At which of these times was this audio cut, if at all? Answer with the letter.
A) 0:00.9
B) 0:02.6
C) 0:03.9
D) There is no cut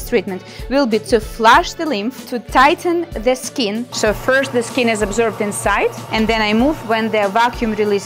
C